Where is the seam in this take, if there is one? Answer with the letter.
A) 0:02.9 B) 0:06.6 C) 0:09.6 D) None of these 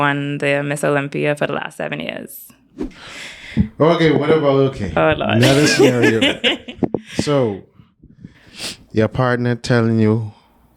A